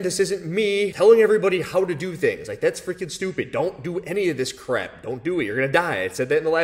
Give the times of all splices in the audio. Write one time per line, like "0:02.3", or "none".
0:00.9